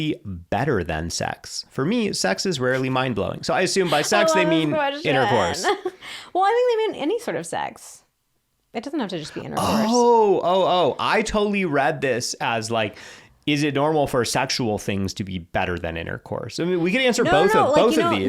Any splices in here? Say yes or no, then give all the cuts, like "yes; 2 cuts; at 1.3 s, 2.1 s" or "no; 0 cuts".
no; 0 cuts